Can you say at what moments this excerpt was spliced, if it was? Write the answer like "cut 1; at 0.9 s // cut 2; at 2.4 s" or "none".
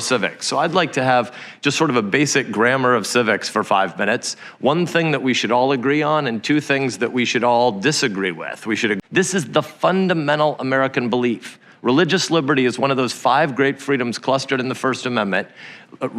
cut 1; at 9.0 s